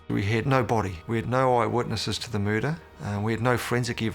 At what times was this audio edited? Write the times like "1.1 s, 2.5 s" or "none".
1.0 s, 2.9 s